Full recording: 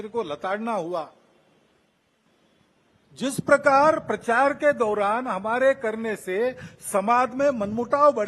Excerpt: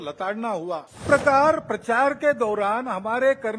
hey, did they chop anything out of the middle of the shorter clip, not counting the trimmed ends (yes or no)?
yes